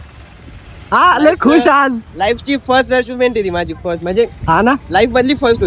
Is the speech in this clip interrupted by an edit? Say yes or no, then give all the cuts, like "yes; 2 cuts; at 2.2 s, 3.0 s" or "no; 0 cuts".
no; 0 cuts